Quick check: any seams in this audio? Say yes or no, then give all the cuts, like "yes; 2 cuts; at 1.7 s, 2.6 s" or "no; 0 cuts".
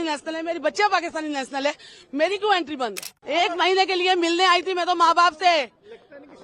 yes; 1 cut; at 3.1 s